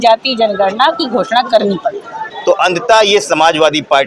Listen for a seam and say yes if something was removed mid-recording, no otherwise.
yes